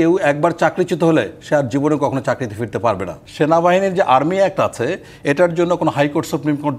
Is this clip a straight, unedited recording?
no; 1 cut; at 3.2 s

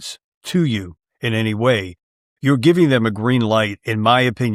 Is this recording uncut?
yes; 0 cuts

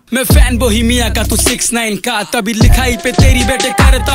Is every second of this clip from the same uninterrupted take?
yes; 0 cuts

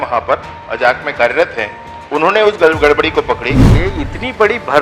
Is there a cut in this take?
yes; 1 cut; at 3.7 s

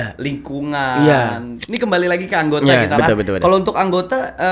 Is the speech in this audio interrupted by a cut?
yes; 1 cut; at 1.5 s

